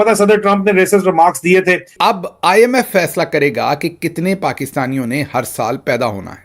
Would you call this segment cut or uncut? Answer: cut